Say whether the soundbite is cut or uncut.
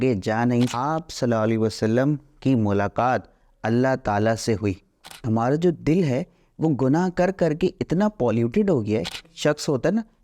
cut